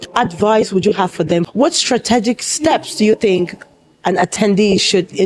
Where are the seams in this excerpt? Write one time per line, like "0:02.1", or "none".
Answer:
0:01.5